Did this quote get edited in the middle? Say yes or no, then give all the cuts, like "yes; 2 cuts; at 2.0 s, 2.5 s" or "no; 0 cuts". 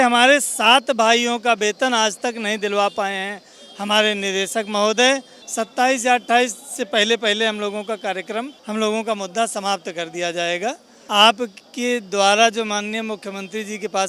yes; 3 cuts; at 5.4 s, 8.6 s, 10.9 s